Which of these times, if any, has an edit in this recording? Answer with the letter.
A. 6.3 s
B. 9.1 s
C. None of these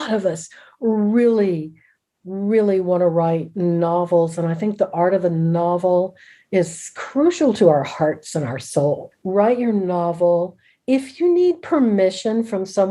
B